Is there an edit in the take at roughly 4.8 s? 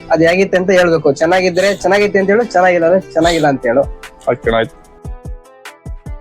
yes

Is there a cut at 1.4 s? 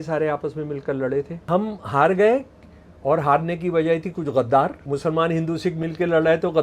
yes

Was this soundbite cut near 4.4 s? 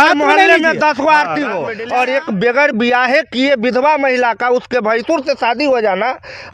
no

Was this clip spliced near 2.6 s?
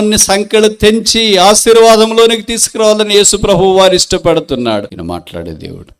no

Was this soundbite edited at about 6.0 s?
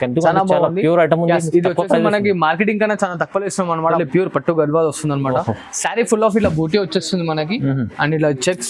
no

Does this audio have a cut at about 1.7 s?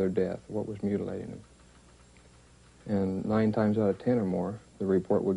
yes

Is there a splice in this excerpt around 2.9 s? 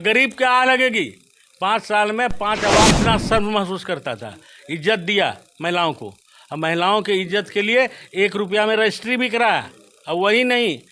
yes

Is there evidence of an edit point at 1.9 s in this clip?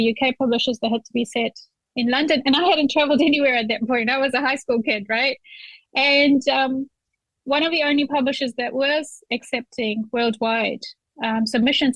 no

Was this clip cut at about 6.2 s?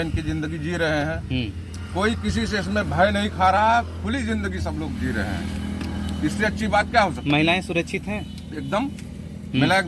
no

